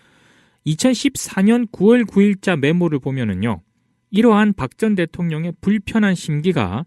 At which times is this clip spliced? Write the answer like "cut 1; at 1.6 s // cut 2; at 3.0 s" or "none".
cut 1; at 5.6 s